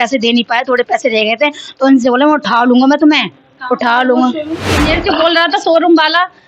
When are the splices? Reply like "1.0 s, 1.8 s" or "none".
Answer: 4.6 s